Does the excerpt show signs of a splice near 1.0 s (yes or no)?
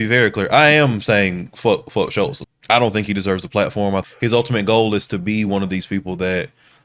no